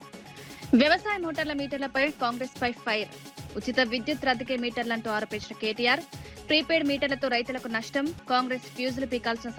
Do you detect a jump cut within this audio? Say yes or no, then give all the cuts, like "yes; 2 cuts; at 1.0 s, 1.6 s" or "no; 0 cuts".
no; 0 cuts